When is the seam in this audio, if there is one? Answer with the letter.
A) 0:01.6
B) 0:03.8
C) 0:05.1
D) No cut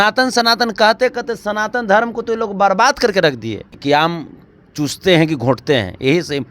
B